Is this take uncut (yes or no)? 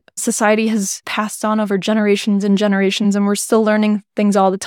no